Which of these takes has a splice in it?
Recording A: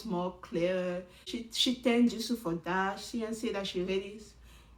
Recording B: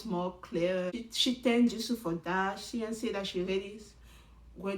B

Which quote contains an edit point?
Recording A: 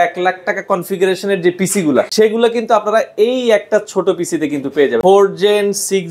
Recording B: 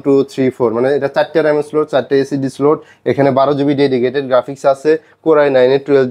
A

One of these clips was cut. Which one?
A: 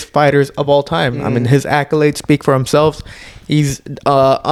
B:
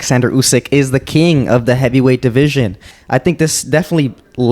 B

